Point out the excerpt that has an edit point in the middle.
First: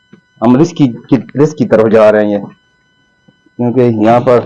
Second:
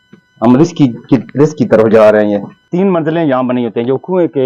second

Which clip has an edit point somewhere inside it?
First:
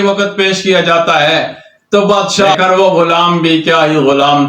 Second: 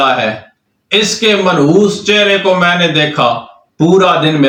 first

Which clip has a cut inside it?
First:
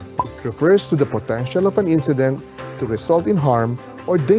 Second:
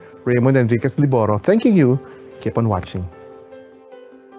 second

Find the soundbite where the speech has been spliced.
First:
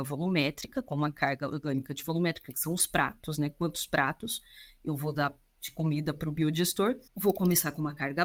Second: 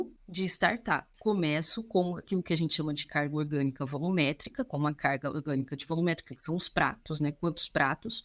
second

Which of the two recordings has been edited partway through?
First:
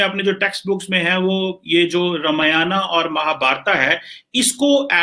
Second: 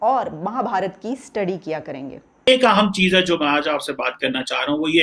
second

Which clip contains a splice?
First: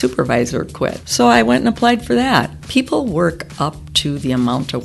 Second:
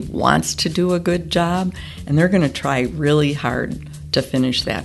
first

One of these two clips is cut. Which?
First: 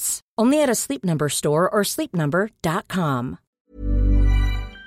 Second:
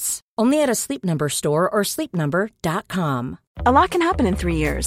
first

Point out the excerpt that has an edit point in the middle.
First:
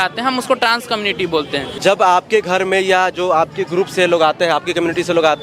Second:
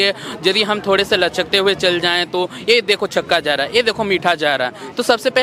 first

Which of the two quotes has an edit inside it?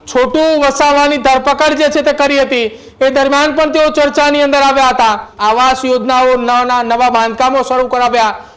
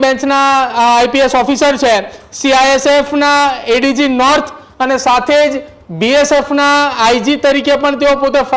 first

